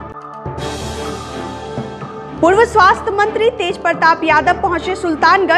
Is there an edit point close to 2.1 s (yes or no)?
yes